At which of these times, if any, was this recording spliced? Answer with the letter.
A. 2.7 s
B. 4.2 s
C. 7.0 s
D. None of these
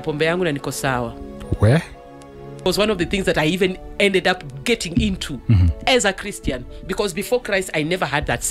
A